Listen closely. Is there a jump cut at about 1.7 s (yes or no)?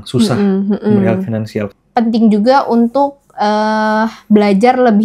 yes